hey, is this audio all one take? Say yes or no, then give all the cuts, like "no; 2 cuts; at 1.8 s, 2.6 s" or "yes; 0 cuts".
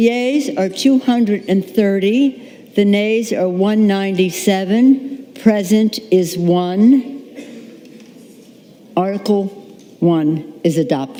yes; 0 cuts